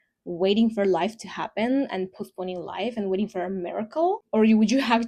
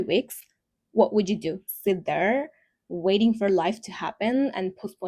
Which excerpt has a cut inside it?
second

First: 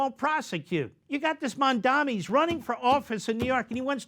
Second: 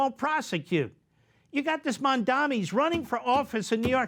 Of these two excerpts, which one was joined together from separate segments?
first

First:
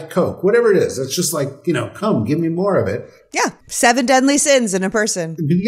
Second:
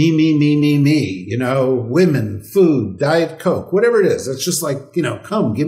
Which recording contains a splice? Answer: first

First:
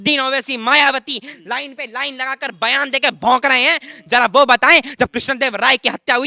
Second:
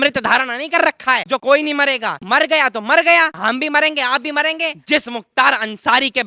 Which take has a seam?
second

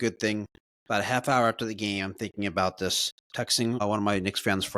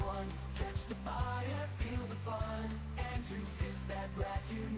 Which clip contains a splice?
first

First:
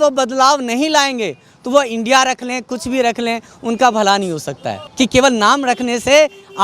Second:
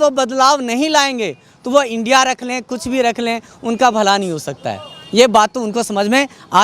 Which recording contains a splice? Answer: first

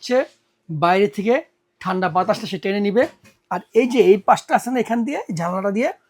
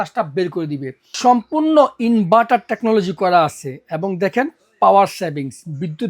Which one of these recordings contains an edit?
second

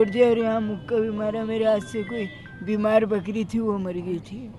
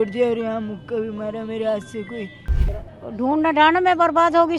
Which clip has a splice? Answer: second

